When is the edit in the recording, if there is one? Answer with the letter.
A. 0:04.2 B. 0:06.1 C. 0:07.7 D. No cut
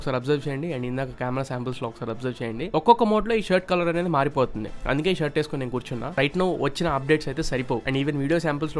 B